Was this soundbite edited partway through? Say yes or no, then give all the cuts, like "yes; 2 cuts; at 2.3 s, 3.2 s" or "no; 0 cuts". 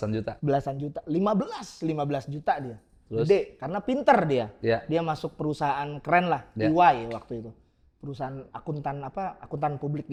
no; 0 cuts